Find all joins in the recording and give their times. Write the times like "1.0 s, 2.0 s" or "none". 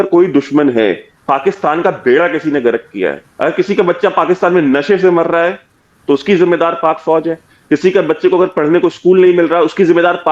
1.1 s, 3.3 s